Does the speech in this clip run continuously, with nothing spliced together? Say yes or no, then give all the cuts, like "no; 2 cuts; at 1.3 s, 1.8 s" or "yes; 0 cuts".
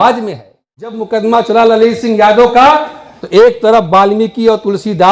no; 1 cut; at 1.0 s